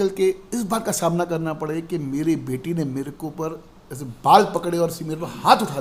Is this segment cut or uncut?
uncut